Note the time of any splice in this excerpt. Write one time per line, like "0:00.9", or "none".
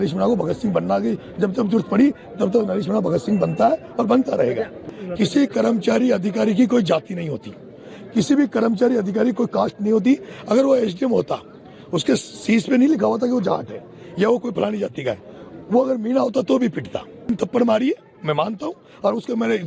0:04.9
0:17.3